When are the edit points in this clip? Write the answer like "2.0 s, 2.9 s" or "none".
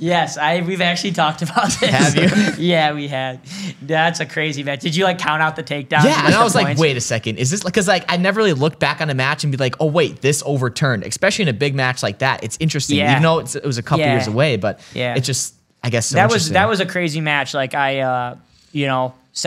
none